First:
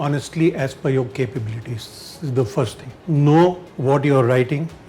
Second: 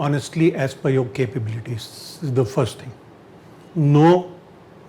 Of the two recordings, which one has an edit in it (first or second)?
first